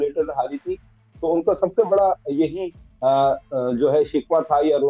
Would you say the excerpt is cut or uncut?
uncut